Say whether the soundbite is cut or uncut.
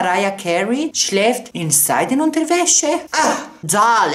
cut